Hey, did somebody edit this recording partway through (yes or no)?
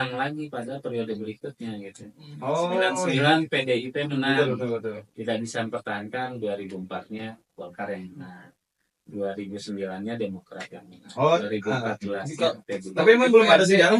no